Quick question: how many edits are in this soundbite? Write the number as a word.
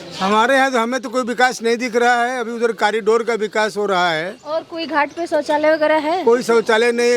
zero